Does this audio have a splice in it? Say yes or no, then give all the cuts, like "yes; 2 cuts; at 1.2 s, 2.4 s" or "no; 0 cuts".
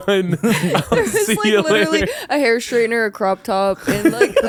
no; 0 cuts